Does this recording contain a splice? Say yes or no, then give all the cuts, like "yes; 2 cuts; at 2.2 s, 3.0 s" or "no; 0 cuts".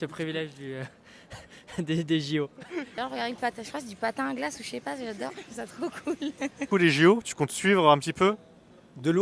yes; 2 cuts; at 2.9 s, 6.6 s